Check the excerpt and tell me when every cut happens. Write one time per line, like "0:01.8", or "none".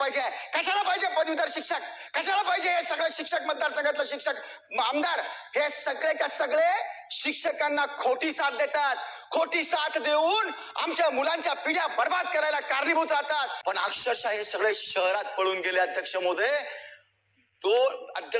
0:13.5